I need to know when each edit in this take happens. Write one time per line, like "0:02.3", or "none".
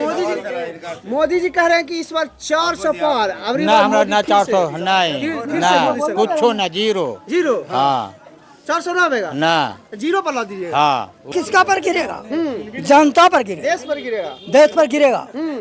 0:11.3